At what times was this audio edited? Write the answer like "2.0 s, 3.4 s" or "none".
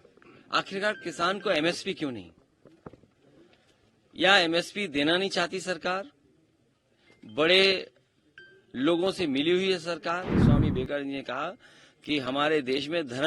10.4 s